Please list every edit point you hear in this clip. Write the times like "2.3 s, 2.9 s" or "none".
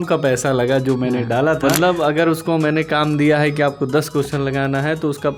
1.6 s